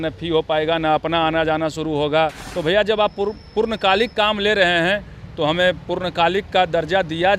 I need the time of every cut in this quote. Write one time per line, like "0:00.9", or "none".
0:02.5